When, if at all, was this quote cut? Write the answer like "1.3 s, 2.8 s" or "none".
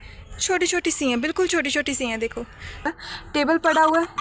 2.9 s